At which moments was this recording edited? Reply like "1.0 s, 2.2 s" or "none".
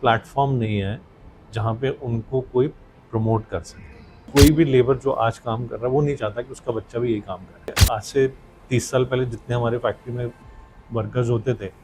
4.3 s, 7.8 s